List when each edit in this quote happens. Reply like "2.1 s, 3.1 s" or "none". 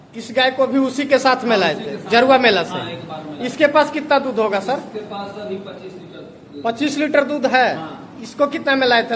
none